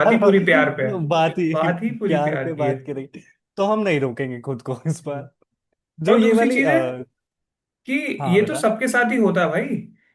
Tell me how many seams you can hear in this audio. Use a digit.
0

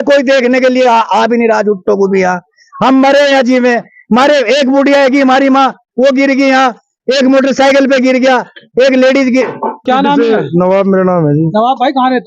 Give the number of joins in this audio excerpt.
1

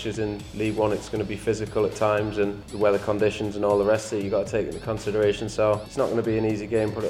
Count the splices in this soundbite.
2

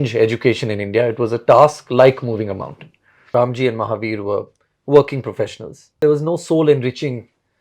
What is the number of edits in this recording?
2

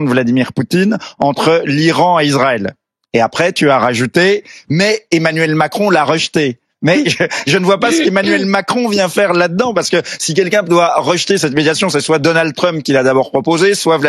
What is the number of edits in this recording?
1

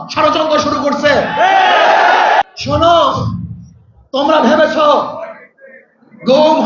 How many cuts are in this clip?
1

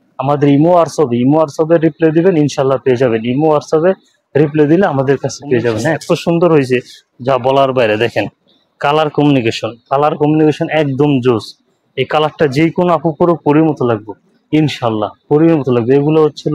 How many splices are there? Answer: 1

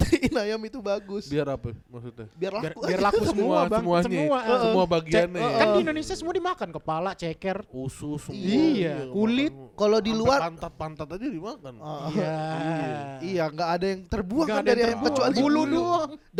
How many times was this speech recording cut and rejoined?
0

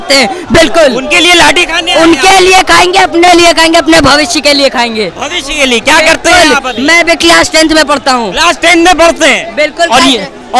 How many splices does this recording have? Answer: 0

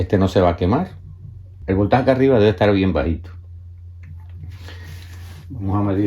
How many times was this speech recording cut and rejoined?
1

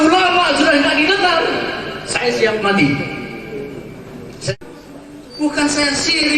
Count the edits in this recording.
1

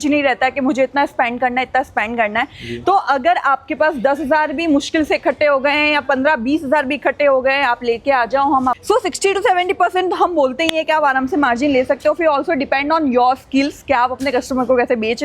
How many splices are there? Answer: 1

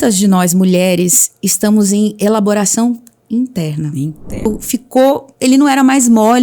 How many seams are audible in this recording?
1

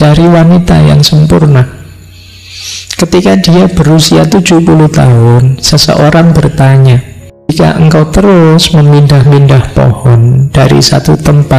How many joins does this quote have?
1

